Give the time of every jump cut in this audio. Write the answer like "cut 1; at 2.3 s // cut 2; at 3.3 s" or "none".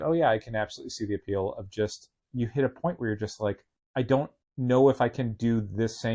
cut 1; at 3.7 s // cut 2; at 4.4 s

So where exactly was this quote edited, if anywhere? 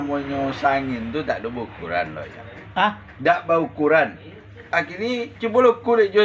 cut 1; at 4.4 s

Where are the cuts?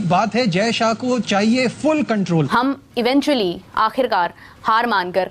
cut 1; at 2.6 s

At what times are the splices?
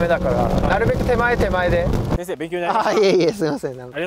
cut 1; at 2.2 s

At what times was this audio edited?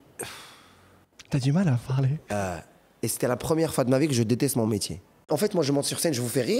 cut 1; at 5.2 s

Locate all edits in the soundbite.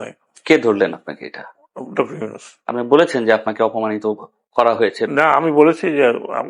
none

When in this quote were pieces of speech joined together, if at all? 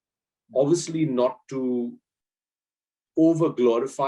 none

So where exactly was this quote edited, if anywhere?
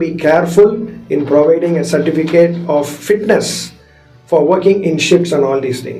none

